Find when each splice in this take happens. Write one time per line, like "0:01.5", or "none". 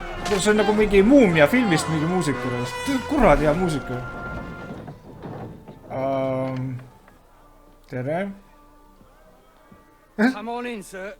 0:04.3